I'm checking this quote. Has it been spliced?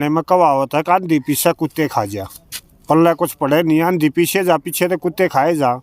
no; 0 cuts

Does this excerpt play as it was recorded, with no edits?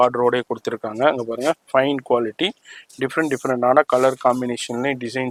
yes; 0 cuts

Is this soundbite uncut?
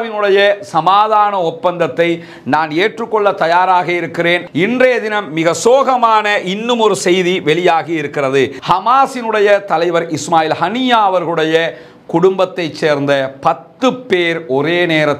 no; 2 cuts; at 4.4 s, 8.6 s

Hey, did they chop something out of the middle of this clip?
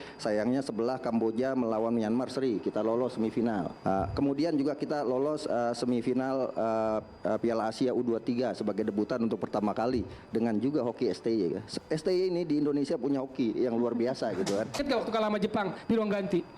yes; 1 cut; at 14.7 s

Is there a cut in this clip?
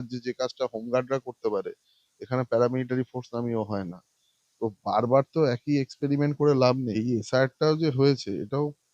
yes; 1 cut; at 6.8 s

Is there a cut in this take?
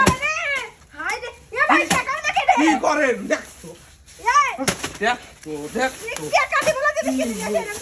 no; 0 cuts

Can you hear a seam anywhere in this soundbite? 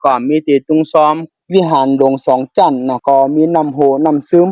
yes; 2 cuts; at 1.2 s, 3.0 s

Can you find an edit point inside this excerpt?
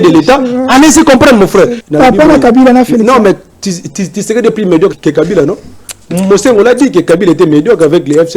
yes; 2 cuts; at 1.8 s, 5.0 s

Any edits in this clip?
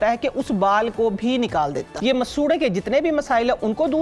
yes; 1 cut; at 1.9 s

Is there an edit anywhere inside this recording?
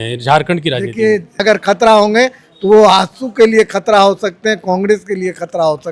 yes; 1 cut; at 1.4 s

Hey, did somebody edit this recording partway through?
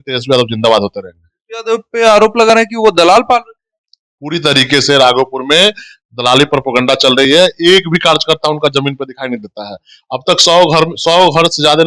no; 0 cuts

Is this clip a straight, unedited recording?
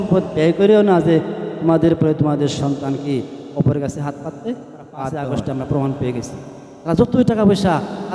no; 1 cut; at 5.2 s

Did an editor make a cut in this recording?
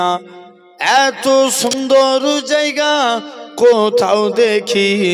no; 0 cuts

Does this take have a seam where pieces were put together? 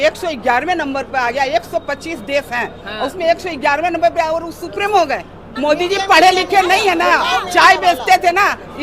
yes; 1 cut; at 5.5 s

